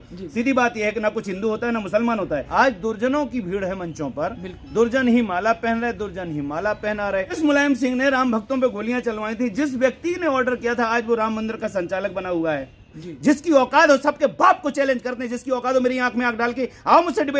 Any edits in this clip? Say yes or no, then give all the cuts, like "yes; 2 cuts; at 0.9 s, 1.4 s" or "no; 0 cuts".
yes; 3 cuts; at 2.5 s, 7.4 s, 12.9 s